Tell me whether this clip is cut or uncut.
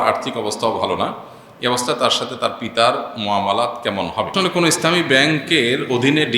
cut